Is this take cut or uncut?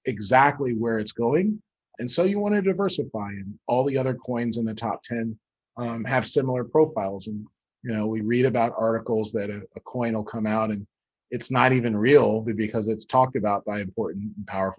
uncut